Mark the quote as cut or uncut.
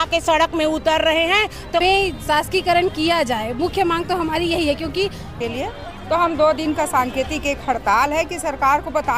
cut